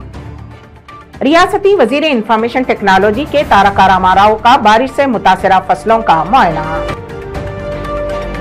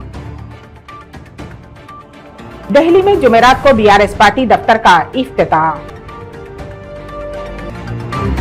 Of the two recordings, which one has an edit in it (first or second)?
second